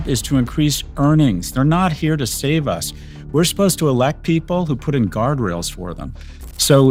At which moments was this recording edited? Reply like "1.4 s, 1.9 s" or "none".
none